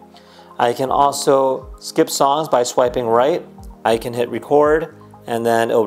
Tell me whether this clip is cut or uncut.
cut